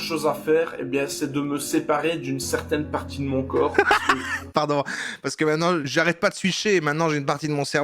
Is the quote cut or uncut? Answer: uncut